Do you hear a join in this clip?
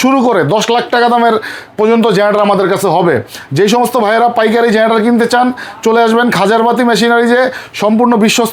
no; 0 cuts

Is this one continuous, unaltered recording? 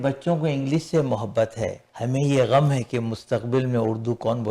no; 1 cut; at 1.9 s

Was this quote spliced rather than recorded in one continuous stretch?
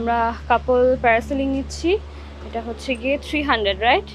no; 0 cuts

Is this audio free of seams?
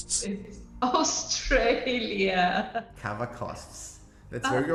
yes; 0 cuts

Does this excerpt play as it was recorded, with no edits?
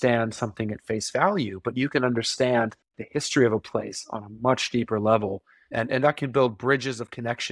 yes; 0 cuts

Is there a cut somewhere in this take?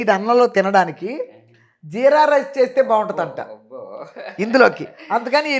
no; 0 cuts

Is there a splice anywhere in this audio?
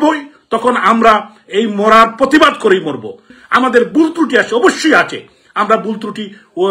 yes; 1 cut; at 3.4 s

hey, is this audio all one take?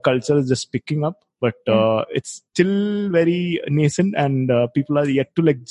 yes; 0 cuts

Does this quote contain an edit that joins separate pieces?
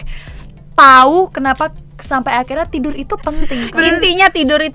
yes; 1 cut; at 3.6 s

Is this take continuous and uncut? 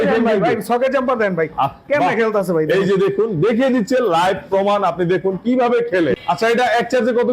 no; 1 cut; at 6.2 s

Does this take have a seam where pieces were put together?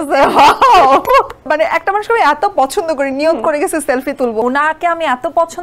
yes; 2 cuts; at 1.5 s, 4.4 s

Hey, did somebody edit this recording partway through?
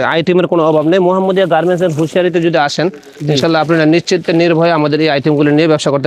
no; 0 cuts

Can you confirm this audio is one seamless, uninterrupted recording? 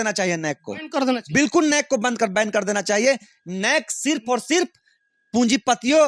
yes; 0 cuts

